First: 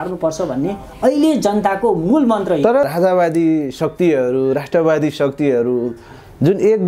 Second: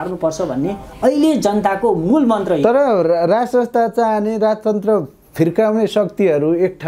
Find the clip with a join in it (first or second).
first